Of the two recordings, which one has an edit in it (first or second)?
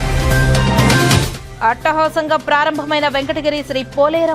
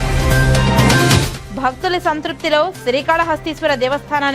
second